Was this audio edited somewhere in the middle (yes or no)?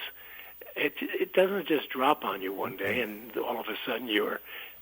no